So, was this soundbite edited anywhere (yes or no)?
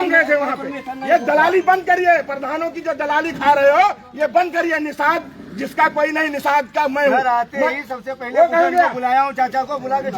no